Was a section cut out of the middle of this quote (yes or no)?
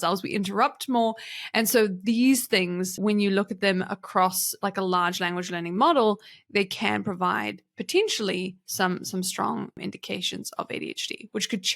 yes